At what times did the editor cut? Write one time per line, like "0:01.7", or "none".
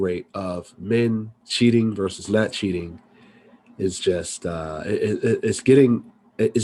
none